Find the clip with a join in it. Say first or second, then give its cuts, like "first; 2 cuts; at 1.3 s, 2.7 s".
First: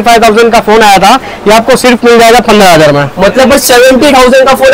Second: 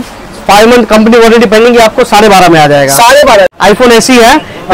second; 1 cut; at 3.5 s